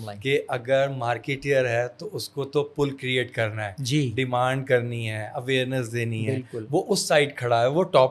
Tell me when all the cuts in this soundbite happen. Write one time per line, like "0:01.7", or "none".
none